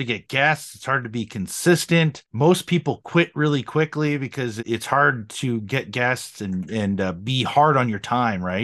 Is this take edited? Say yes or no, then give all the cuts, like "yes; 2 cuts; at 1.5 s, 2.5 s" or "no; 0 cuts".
yes; 2 cuts; at 2.2 s, 4.6 s